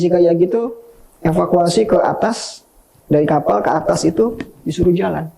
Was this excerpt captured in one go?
yes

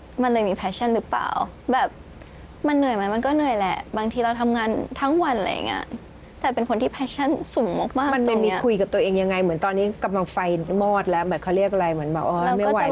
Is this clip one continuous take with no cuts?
yes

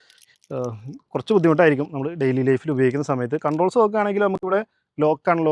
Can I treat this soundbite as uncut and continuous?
yes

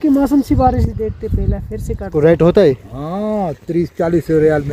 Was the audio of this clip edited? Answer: yes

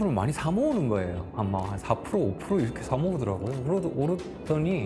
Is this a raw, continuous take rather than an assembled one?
yes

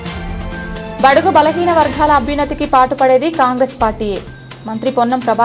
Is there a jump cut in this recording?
no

